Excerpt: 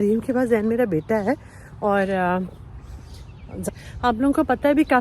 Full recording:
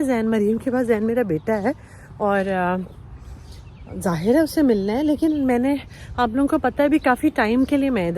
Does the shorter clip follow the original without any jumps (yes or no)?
no